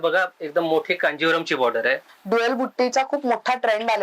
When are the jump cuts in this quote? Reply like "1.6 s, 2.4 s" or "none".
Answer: 2.1 s